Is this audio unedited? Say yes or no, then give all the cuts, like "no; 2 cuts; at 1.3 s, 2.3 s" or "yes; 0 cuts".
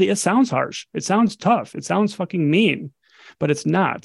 yes; 0 cuts